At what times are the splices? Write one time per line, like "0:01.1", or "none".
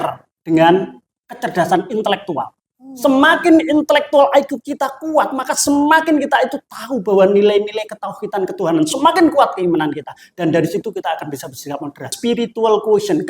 0:12.1